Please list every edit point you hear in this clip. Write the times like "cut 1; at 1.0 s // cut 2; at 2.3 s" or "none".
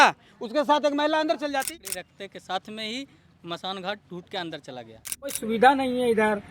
cut 1; at 1.7 s // cut 2; at 5.4 s